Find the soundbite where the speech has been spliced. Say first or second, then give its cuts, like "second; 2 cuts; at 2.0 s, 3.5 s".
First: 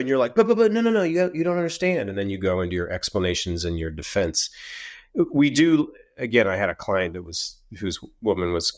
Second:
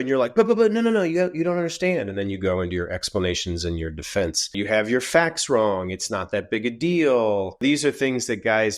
second; 2 cuts; at 4.6 s, 7.6 s